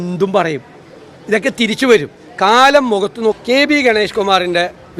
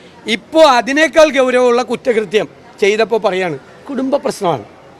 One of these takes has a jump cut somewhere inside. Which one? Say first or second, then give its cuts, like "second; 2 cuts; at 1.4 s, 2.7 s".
first; 1 cut; at 3.4 s